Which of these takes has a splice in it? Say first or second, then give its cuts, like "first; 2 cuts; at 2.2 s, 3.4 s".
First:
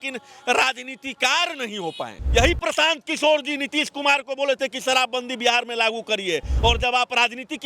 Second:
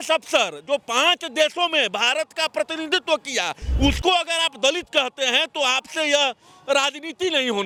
first; 1 cut; at 2.1 s